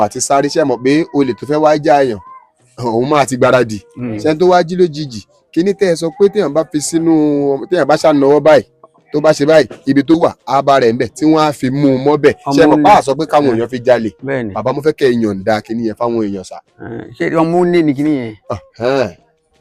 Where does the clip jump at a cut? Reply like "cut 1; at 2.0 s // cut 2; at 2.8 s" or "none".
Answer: none